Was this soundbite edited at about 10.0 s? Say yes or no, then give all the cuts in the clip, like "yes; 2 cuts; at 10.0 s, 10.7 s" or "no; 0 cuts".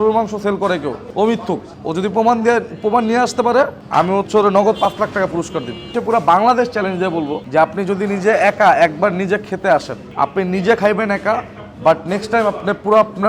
yes; 6 cuts; at 1.0 s, 1.7 s, 3.8 s, 6.0 s, 7.4 s, 10.0 s